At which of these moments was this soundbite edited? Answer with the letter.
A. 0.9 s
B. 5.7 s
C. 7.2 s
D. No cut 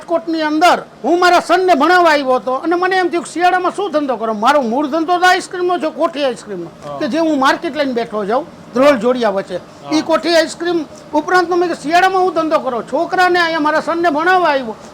A